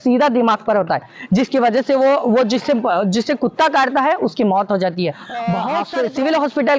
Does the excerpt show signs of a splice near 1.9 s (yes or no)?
no